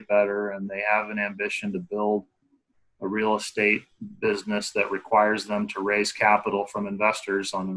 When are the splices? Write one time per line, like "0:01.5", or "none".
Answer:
none